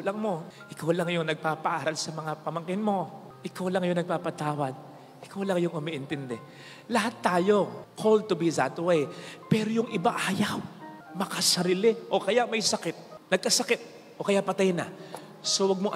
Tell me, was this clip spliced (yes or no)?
no